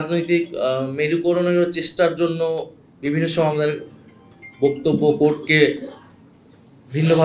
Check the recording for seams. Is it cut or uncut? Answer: uncut